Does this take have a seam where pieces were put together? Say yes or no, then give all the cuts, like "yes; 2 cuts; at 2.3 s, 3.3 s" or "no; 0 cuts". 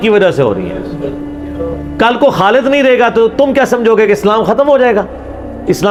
no; 0 cuts